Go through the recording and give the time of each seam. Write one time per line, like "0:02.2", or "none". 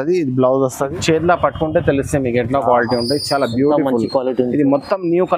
0:01.0